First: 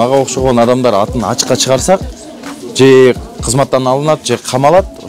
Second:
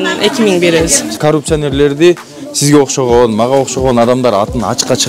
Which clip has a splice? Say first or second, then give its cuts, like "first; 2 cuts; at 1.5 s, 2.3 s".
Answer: second; 1 cut; at 1.2 s